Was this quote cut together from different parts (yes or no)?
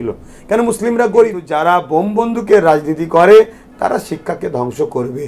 yes